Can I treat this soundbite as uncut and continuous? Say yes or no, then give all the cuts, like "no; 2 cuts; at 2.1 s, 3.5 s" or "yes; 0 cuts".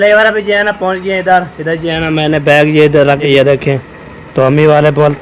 no; 1 cut; at 3.3 s